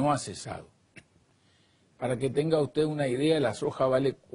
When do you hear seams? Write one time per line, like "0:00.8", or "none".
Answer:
0:03.4